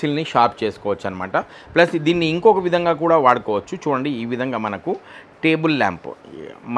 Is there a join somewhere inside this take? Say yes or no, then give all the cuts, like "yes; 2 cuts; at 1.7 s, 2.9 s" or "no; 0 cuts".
no; 0 cuts